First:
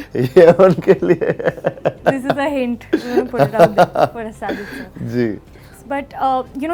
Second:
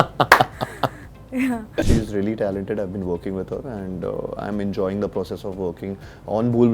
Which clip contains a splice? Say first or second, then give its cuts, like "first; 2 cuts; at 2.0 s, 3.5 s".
second; 1 cut; at 1.9 s